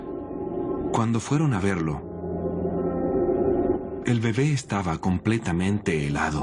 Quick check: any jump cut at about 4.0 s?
yes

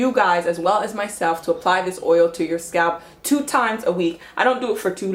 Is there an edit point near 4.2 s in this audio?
yes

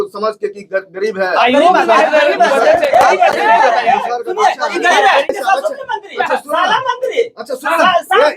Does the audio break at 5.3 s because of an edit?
yes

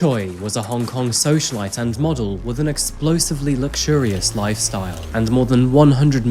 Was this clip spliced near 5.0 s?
yes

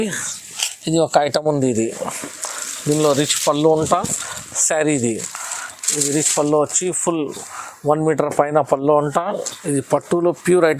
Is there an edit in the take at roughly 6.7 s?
no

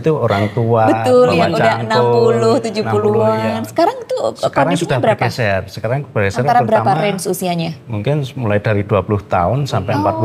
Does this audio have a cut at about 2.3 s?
no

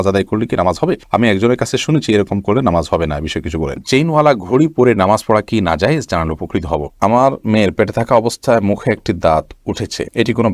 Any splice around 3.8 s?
yes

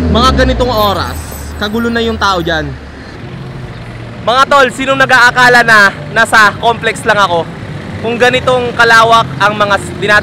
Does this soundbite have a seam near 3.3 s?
yes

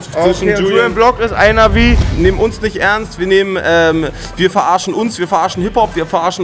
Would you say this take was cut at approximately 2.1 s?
yes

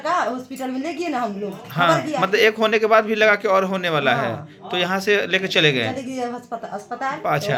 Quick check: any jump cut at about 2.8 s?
no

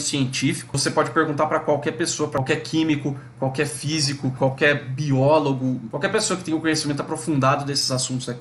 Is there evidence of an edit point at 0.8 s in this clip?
yes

